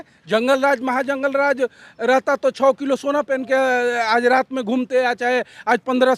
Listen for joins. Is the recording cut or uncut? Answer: uncut